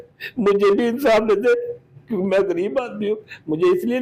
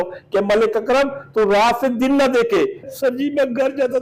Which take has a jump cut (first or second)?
second